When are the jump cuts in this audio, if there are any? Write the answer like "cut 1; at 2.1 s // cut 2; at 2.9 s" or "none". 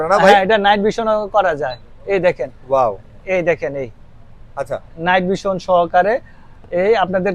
none